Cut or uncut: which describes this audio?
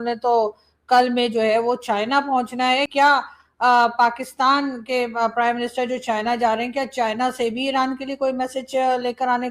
cut